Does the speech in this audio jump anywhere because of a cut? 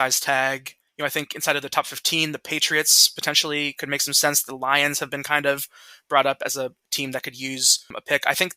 no; 0 cuts

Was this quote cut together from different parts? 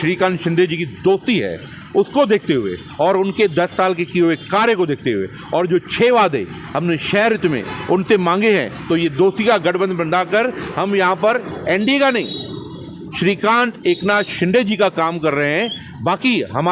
no; 0 cuts

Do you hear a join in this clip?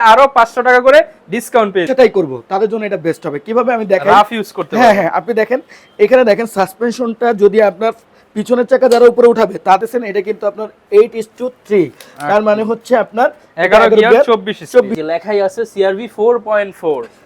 yes; 3 cuts; at 1.8 s, 9.8 s, 14.9 s

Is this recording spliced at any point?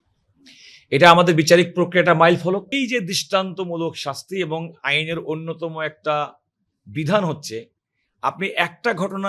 yes; 1 cut; at 2.7 s

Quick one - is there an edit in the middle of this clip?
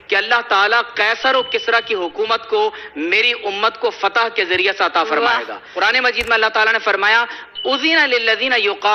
yes; 1 cut; at 5.7 s

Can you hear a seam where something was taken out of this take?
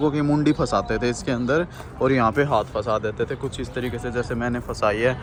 no; 0 cuts

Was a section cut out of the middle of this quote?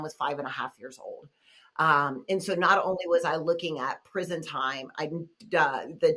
no; 0 cuts

